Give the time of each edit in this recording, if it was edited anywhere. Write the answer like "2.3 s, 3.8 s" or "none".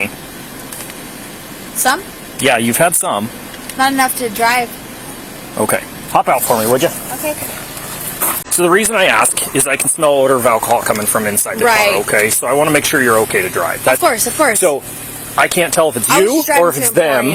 8.4 s